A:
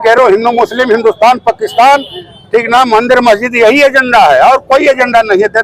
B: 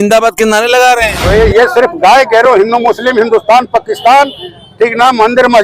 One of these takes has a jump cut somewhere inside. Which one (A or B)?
B